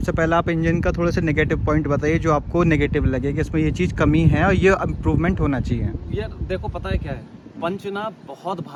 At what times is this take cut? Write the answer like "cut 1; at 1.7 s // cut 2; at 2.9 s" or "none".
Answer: none